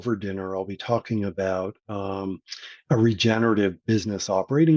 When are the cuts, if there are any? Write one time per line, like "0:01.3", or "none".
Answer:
none